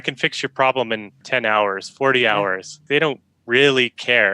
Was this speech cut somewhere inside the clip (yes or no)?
yes